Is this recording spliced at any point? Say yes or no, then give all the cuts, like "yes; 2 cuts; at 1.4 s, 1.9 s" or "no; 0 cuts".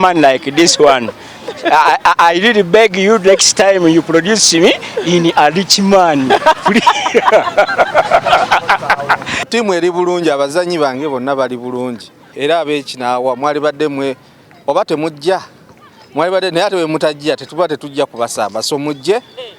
yes; 2 cuts; at 9.5 s, 12.2 s